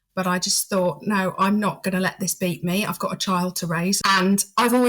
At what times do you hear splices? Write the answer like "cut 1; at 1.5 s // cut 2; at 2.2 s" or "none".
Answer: cut 1; at 4.0 s